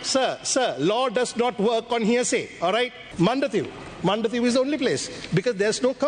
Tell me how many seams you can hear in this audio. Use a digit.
1